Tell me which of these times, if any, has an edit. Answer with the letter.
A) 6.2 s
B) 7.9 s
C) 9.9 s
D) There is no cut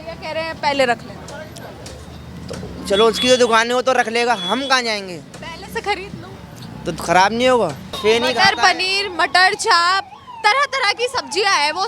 B